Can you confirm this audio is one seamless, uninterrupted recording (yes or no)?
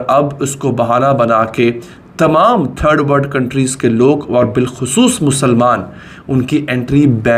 yes